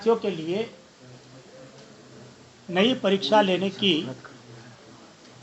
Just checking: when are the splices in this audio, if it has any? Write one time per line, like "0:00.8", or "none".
none